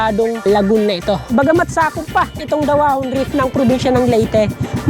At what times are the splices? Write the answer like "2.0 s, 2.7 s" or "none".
1.2 s